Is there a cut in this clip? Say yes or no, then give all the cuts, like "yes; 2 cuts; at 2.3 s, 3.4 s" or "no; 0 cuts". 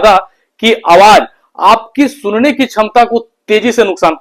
no; 0 cuts